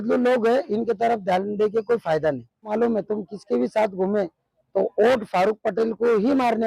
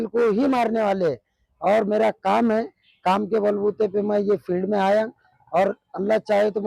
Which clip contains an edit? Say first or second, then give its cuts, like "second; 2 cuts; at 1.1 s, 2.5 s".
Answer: first; 1 cut; at 2.7 s